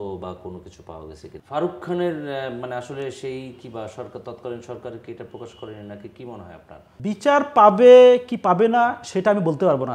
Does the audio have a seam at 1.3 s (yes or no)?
yes